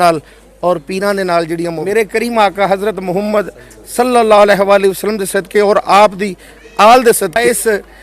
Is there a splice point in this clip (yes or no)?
yes